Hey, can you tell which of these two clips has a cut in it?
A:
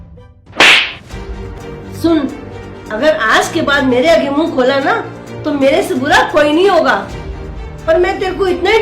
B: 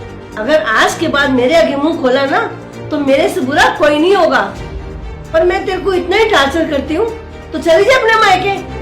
A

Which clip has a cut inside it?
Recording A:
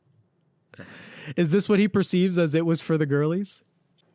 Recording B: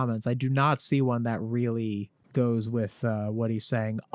B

